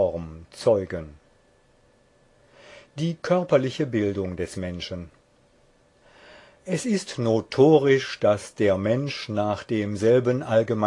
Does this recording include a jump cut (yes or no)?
yes